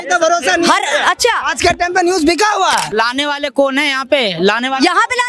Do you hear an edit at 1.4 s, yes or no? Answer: no